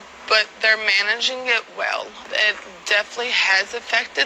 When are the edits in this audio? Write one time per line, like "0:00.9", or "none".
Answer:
none